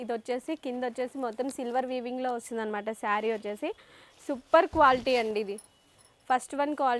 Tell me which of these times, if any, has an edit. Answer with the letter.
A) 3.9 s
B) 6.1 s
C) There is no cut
C